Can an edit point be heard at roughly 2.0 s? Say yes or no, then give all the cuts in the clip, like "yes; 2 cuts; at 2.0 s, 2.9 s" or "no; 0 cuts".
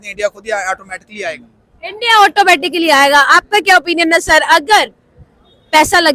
no; 0 cuts